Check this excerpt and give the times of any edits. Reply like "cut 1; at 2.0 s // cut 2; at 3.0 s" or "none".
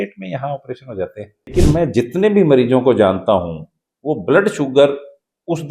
cut 1; at 1.5 s